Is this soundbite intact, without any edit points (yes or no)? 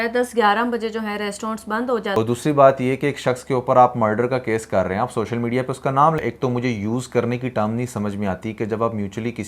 no